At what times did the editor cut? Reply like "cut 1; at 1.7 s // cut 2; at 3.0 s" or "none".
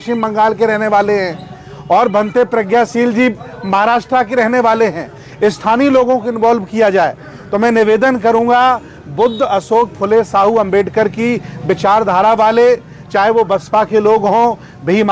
none